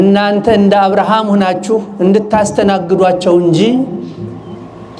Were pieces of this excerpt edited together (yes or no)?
no